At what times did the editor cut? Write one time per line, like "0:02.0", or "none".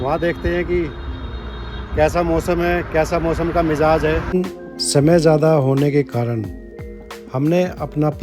0:04.3